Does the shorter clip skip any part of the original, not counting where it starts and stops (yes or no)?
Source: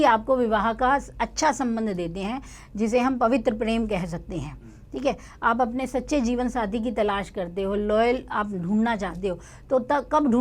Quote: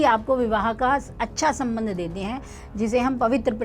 no